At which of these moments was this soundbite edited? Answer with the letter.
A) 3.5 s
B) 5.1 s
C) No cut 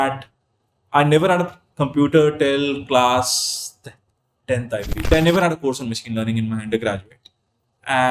B